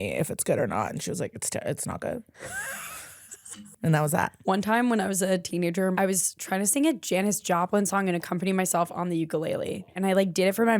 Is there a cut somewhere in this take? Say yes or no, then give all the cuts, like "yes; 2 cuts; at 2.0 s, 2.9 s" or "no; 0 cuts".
yes; 5 cuts; at 2.3 s, 3.7 s, 4.4 s, 5.9 s, 9.9 s